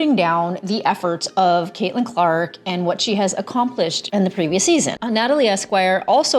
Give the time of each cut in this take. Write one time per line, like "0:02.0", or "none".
0:05.0